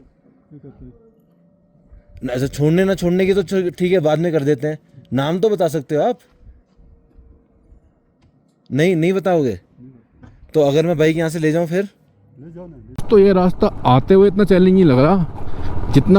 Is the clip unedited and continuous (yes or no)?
no